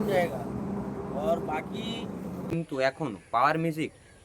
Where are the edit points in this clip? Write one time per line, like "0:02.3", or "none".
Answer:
0:02.5